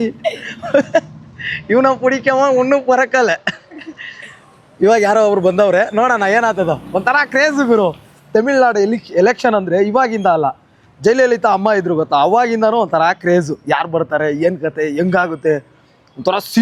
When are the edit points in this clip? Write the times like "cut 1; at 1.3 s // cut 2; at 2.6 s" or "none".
none

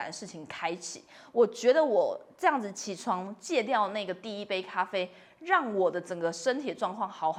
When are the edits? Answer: none

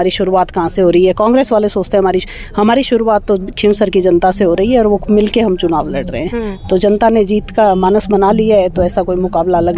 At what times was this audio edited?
none

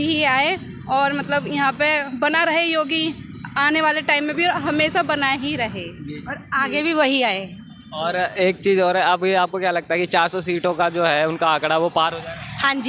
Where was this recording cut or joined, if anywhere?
none

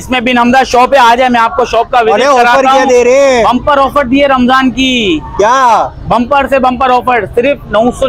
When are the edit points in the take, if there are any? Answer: none

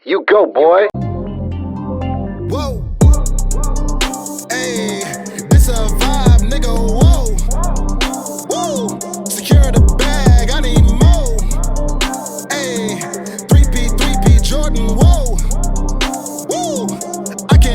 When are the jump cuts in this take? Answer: cut 1; at 0.9 s

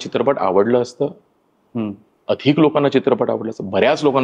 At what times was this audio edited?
none

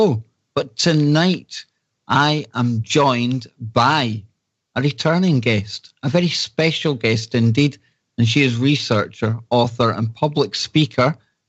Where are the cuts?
none

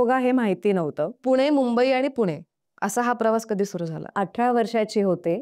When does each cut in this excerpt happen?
cut 1; at 1.2 s // cut 2; at 4.2 s

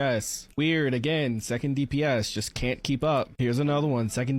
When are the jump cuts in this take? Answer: cut 1; at 2.8 s // cut 2; at 3.7 s

